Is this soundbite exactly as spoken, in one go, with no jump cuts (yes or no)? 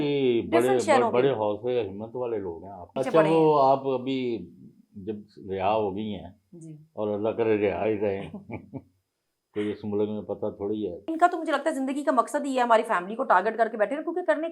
no